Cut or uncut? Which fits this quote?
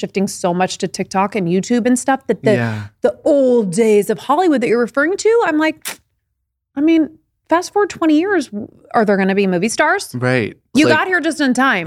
cut